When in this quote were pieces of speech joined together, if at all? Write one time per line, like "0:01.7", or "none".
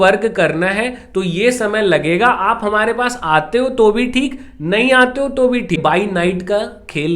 0:05.8